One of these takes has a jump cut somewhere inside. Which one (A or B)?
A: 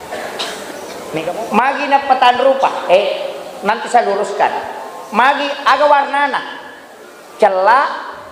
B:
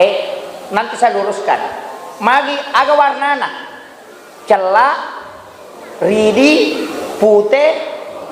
A